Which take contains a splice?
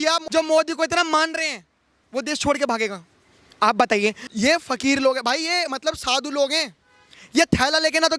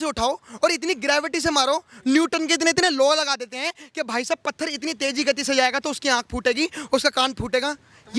first; 2 cuts; at 2.0 s, 4.2 s

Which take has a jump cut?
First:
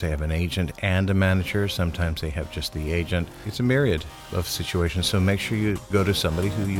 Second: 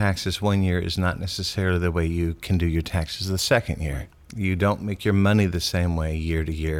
first; 3 cuts; at 3.5 s, 4.2 s, 5.9 s

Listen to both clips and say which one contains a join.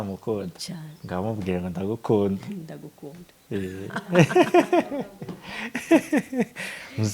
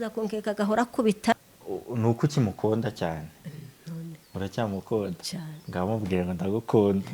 second; 1 cut; at 1.3 s

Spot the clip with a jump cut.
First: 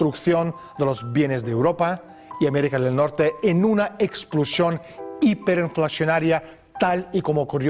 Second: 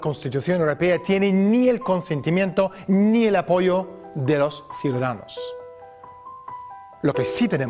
first; 1 cut; at 6.6 s

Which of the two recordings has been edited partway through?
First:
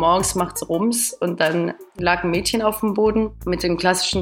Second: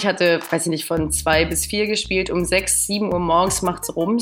first; 2 cuts; at 1.8 s, 3.4 s

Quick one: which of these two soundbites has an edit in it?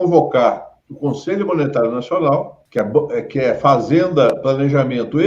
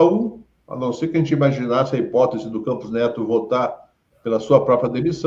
first; 1 cut; at 2.6 s

